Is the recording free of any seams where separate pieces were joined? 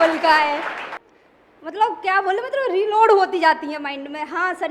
no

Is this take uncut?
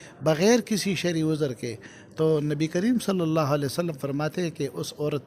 yes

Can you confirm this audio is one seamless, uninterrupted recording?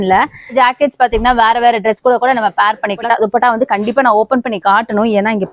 no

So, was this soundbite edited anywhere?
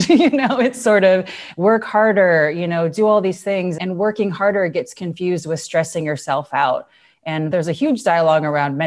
yes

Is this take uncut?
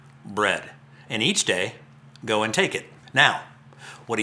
no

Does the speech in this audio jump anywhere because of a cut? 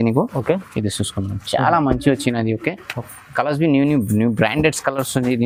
no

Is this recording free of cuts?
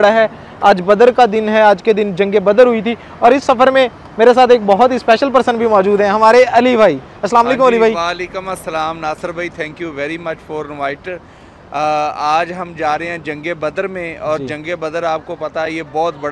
yes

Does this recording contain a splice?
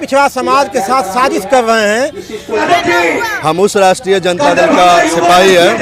yes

